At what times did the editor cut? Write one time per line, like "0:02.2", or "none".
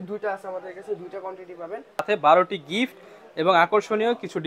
0:02.0